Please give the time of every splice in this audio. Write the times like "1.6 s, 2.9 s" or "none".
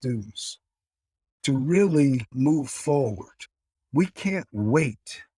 1.3 s, 2.3 s